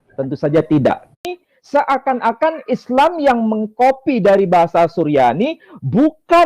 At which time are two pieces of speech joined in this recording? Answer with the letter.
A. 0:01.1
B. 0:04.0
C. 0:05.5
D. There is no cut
A